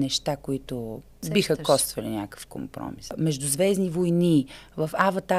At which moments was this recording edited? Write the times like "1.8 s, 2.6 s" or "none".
1.1 s, 3.1 s